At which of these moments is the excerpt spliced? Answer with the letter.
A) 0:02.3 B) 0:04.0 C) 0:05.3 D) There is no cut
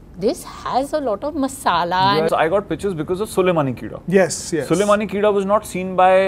A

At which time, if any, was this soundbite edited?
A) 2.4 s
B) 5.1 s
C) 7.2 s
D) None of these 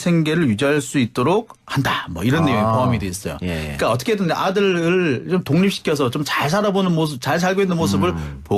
D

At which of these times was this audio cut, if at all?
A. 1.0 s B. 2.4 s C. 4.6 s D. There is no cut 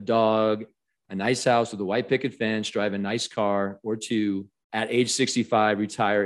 C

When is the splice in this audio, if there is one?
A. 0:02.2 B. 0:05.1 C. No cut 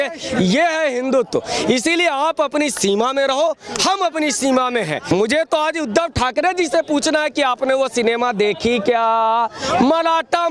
B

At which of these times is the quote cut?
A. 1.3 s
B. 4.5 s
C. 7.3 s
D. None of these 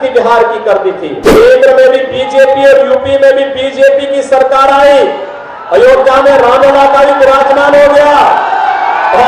A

